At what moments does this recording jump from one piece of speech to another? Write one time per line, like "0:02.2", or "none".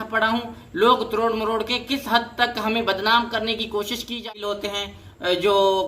0:04.2